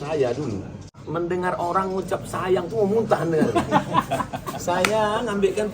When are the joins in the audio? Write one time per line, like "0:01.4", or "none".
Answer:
0:00.9